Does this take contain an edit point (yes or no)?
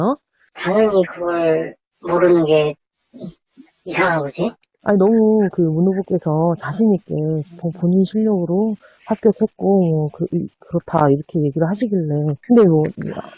yes